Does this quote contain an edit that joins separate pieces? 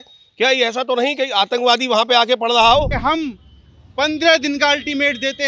yes; 1 cut; at 2.9 s

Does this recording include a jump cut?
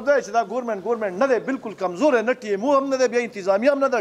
no; 0 cuts

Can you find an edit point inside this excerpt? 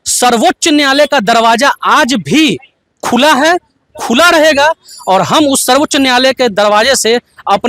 no; 0 cuts

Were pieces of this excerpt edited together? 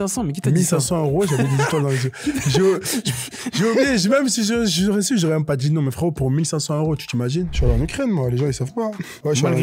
yes; 1 cut; at 7.5 s

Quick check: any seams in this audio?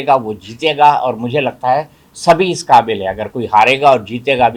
no; 0 cuts

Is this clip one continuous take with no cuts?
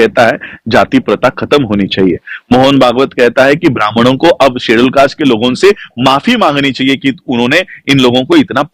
yes; 0 cuts

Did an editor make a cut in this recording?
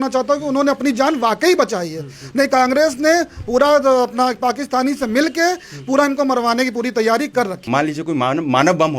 yes; 1 cut; at 7.6 s

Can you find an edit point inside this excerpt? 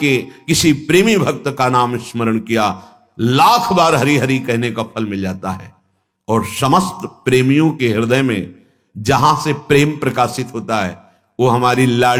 no; 0 cuts

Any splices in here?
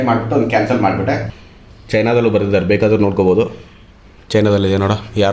yes; 1 cut; at 1.3 s

